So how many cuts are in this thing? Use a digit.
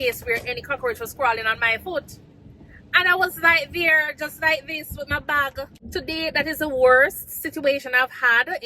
1